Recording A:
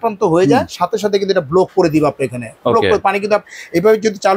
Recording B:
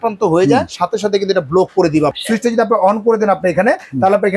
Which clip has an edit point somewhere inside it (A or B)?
B